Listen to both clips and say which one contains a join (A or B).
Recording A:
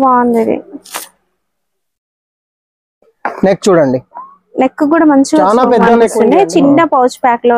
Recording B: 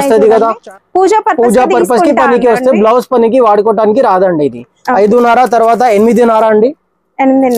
A